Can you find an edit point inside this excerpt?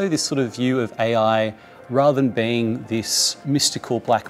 yes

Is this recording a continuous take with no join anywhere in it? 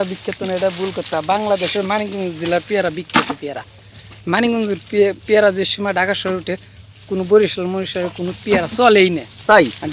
yes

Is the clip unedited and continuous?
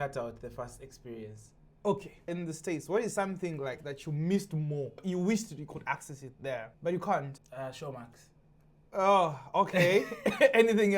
no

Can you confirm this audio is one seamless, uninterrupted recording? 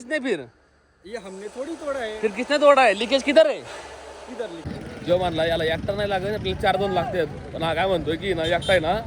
no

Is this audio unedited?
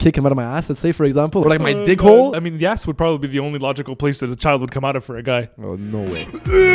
no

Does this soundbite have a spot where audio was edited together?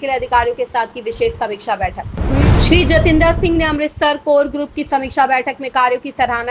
yes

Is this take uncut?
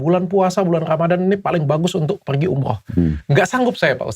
no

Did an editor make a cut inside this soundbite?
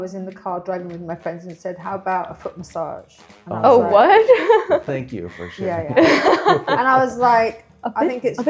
no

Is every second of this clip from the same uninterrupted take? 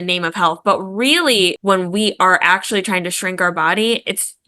no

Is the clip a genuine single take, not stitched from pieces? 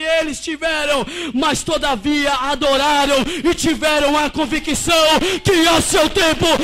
yes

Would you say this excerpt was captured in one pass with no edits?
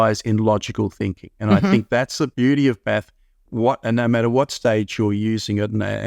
no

